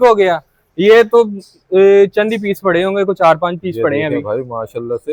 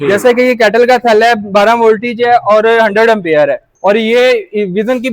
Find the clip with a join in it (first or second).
second